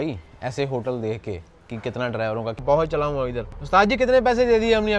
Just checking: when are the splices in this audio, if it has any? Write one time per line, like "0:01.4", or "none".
0:02.6